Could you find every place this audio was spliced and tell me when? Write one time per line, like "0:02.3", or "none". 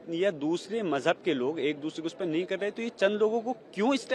none